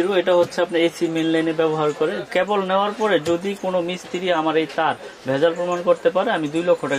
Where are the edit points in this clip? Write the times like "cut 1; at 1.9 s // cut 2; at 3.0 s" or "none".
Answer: cut 1; at 2.2 s // cut 2; at 4.4 s